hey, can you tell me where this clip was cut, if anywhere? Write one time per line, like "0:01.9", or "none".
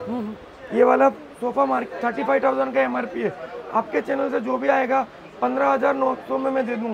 none